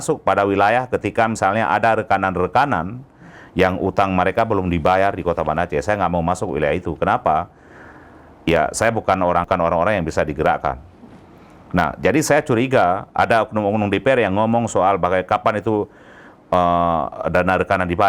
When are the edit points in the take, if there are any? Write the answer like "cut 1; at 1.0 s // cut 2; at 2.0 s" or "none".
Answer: cut 1; at 9.5 s